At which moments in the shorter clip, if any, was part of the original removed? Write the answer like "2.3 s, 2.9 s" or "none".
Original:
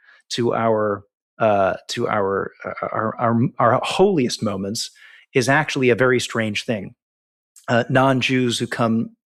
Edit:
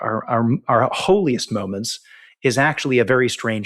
none